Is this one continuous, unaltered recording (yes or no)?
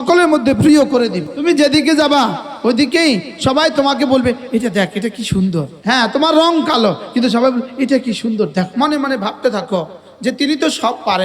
no